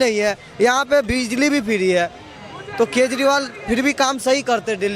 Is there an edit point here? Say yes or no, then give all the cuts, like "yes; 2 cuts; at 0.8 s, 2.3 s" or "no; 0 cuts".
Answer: no; 0 cuts